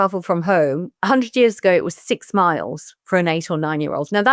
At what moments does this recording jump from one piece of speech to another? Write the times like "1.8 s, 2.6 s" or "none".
0.9 s